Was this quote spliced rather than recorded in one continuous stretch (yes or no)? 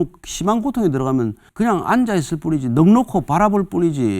yes